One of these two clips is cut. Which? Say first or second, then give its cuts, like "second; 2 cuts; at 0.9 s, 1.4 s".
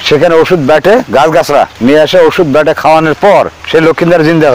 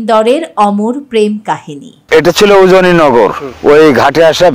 second; 2 cuts; at 2.0 s, 3.5 s